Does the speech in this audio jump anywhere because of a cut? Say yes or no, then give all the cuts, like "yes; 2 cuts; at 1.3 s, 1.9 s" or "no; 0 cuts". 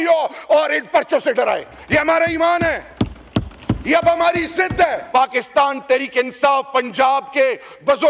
yes; 1 cut; at 5.0 s